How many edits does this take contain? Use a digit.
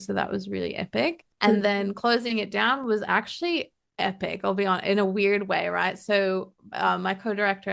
2